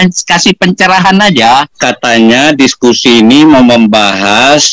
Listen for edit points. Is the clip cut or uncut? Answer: cut